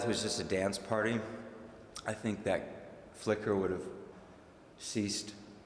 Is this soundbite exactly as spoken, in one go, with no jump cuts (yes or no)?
no